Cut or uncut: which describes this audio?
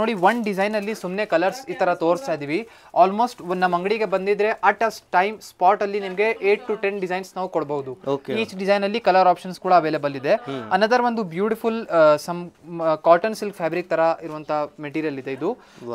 uncut